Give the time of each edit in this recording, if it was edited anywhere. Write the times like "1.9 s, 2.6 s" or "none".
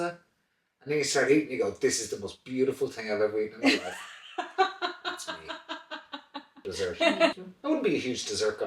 7.3 s

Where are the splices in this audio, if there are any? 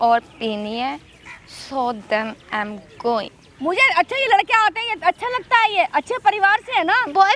3.4 s

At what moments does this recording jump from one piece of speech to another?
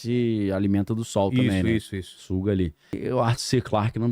2.9 s

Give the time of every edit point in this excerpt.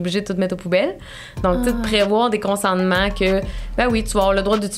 none

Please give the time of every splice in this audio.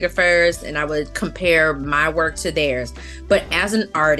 none

